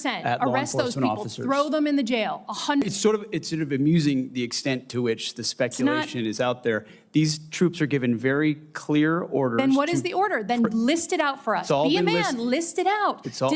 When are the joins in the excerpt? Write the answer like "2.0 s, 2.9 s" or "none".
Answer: 2.8 s